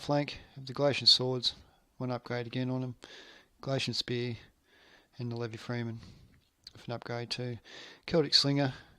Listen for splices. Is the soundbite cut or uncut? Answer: cut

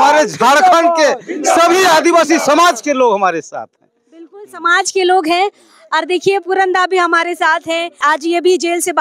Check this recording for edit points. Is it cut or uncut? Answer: uncut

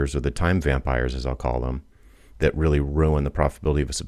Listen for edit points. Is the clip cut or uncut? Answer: uncut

